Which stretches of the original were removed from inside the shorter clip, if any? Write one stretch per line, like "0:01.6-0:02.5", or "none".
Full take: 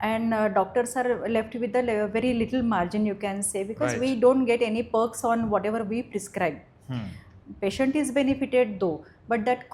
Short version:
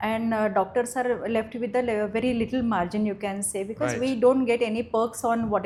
none